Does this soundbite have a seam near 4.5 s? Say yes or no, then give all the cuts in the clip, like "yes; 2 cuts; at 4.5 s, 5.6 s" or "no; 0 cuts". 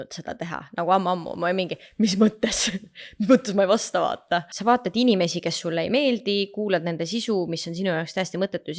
yes; 1 cut; at 4.5 s